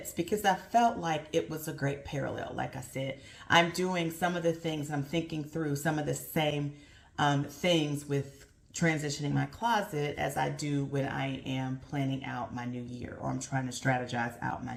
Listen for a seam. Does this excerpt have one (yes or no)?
no